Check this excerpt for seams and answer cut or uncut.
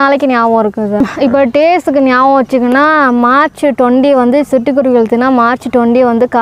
cut